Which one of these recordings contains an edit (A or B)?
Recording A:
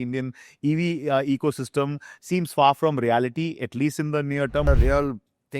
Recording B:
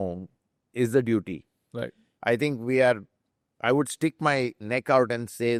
A